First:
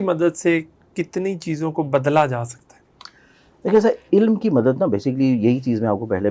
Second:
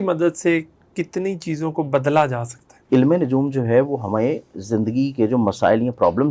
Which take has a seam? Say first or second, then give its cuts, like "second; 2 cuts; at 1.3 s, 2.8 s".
second; 1 cut; at 2.8 s